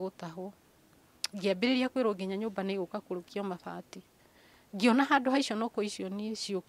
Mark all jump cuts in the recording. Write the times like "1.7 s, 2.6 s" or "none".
none